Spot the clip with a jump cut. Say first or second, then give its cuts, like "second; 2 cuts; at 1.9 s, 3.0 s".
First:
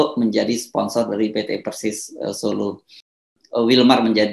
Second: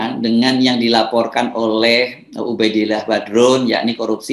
first; 1 cut; at 3.2 s